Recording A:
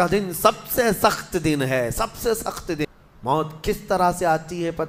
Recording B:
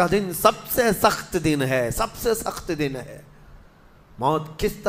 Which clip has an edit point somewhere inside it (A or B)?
A